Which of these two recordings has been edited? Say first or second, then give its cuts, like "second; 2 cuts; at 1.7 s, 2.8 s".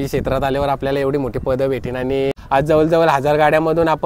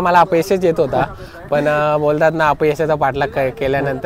first; 1 cut; at 2.4 s